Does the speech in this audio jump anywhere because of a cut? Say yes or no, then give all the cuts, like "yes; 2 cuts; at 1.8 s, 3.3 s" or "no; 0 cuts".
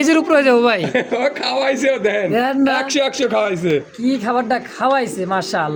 no; 0 cuts